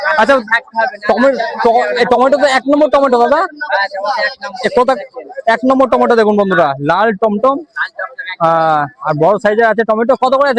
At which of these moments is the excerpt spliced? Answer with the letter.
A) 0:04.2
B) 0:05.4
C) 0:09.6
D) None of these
D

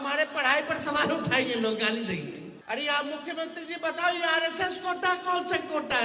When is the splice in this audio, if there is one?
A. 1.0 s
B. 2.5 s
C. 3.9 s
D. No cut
B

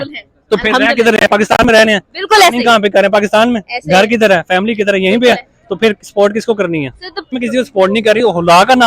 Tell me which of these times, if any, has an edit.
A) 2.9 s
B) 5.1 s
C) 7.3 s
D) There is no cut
C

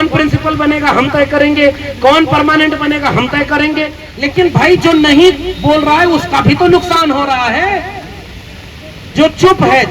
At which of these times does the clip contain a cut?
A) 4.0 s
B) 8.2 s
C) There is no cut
A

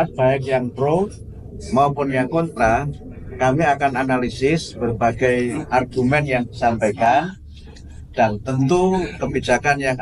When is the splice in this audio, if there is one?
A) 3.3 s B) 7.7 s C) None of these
C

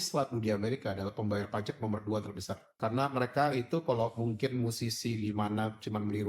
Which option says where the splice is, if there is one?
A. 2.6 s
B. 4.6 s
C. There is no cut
A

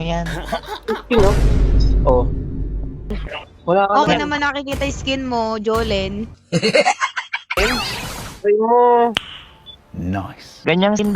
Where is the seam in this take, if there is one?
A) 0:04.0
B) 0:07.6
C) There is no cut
B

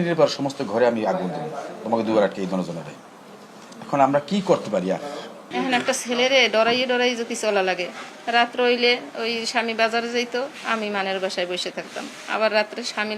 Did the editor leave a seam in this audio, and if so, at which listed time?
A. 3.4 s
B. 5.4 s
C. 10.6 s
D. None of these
B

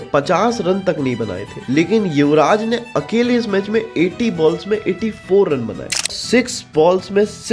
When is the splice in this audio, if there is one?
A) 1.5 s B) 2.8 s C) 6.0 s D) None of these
C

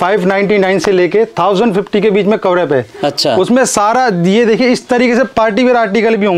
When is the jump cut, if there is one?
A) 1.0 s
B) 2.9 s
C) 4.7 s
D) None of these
D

